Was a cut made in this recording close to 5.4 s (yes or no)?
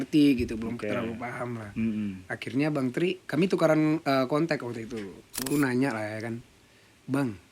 yes